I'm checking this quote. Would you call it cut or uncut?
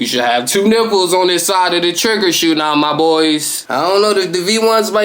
cut